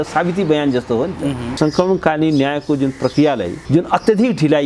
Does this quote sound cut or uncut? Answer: cut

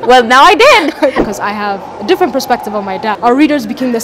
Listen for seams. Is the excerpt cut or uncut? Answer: cut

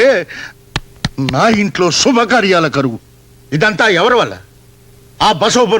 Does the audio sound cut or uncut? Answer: uncut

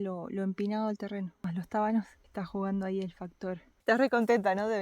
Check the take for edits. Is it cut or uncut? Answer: cut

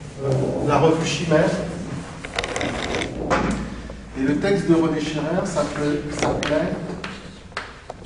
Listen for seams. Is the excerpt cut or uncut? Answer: cut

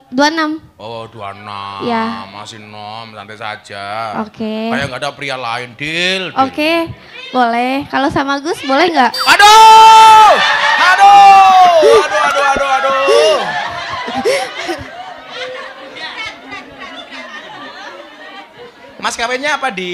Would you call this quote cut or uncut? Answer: uncut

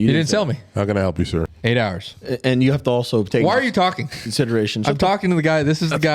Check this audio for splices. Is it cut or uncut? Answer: cut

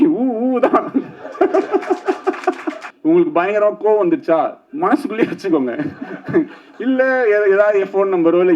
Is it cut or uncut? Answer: cut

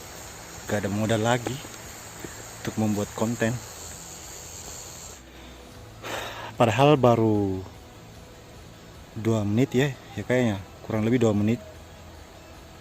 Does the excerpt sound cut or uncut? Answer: cut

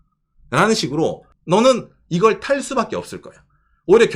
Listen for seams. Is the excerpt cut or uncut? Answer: cut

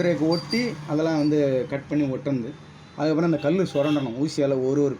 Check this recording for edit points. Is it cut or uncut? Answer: uncut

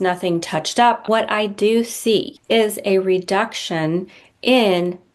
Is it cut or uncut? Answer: cut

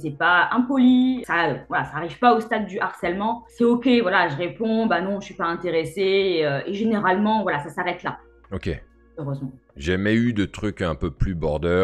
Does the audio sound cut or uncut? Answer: uncut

